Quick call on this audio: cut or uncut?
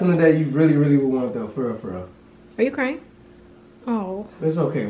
uncut